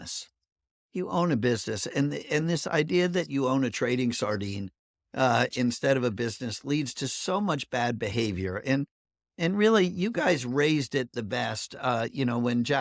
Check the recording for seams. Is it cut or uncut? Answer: uncut